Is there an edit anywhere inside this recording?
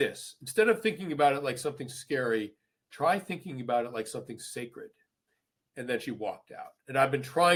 no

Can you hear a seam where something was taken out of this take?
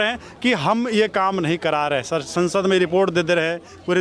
no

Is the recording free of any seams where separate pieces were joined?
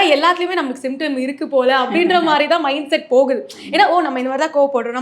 yes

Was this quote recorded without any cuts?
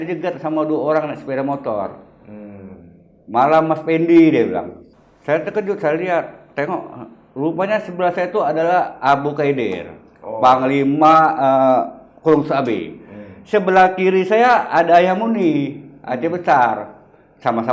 no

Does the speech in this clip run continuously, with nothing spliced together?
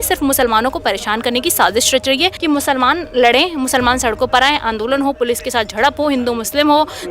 no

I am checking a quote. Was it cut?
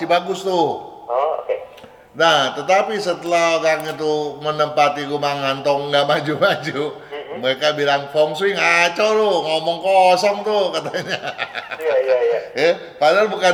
no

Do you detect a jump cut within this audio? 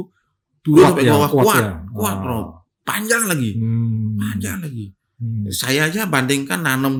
no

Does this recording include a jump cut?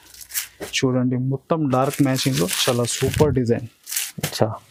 no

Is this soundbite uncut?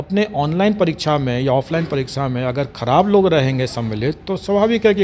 yes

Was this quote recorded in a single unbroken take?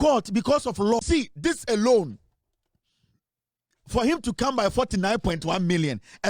no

